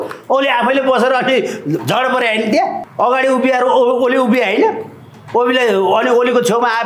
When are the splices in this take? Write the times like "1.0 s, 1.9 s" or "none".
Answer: 2.8 s